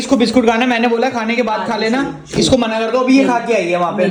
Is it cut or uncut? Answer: uncut